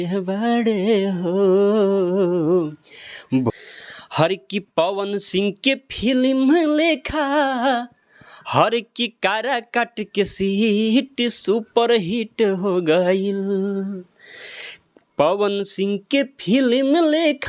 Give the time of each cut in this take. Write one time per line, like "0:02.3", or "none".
0:03.5